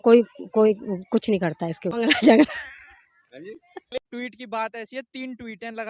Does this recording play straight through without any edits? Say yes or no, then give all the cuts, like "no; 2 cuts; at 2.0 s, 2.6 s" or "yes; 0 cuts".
no; 2 cuts; at 1.9 s, 4.0 s